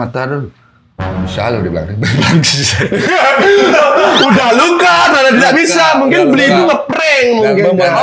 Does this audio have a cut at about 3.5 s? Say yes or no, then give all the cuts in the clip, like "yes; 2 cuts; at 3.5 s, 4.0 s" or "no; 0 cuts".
no; 0 cuts